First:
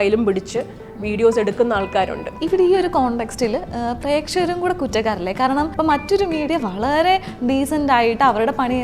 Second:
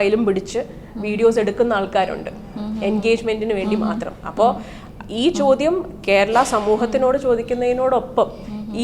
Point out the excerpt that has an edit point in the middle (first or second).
first